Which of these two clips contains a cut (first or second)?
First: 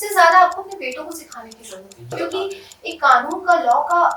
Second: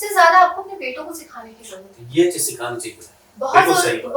first